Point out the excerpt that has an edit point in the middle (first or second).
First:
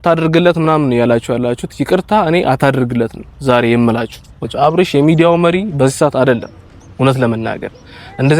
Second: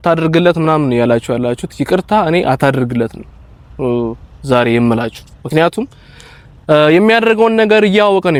first